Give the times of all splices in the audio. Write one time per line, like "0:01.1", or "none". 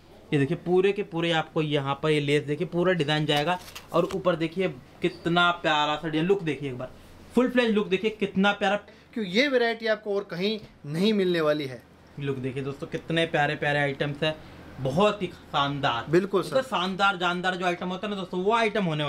0:08.9